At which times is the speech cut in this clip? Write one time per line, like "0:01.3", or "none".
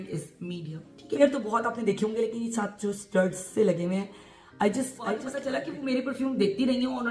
0:01.2
0:05.3